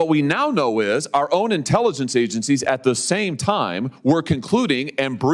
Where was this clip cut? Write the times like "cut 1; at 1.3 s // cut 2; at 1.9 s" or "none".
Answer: none